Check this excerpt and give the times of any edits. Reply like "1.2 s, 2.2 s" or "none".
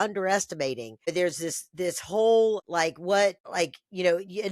1.1 s, 2.7 s, 3.4 s